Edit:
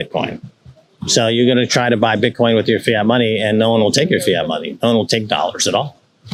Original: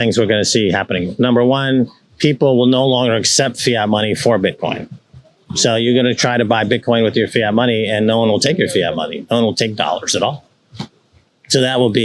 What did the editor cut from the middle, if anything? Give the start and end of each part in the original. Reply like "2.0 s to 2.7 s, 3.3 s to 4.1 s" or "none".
none